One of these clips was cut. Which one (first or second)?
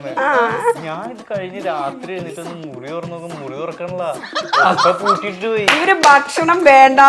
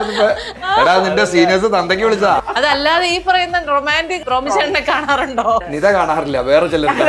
second